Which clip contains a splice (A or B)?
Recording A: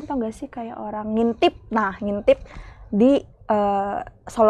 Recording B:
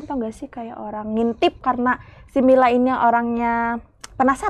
B